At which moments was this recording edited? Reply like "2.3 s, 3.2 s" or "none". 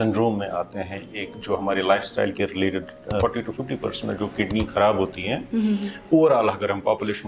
3.2 s